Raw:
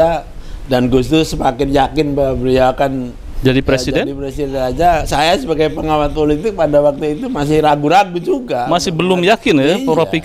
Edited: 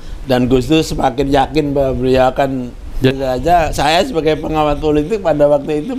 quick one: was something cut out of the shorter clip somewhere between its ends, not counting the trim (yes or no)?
yes